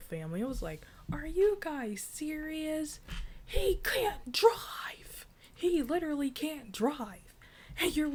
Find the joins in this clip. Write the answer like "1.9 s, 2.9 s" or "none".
none